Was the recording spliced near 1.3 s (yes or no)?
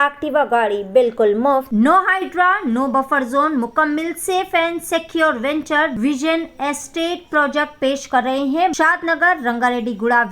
no